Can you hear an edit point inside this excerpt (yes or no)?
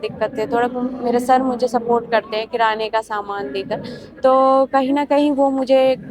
no